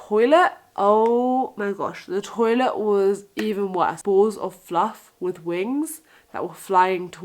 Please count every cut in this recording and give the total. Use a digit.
1